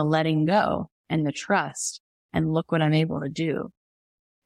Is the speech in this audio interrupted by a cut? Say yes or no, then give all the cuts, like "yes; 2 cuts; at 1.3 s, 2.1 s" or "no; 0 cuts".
no; 0 cuts